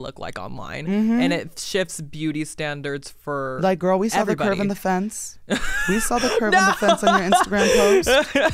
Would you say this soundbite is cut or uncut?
uncut